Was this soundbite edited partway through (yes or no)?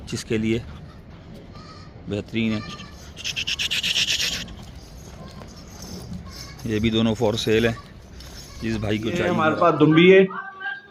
yes